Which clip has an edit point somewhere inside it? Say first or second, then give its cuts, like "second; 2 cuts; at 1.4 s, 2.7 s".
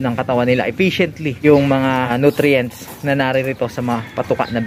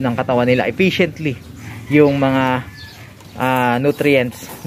first; 2 cuts; at 1.4 s, 2.1 s